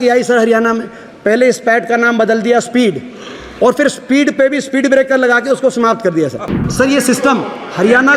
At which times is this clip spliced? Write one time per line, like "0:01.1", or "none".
0:06.6